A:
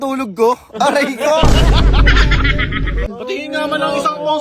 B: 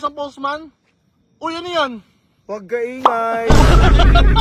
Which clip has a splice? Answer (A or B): A